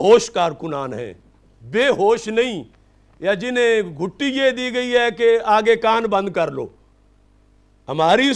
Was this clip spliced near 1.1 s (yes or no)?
no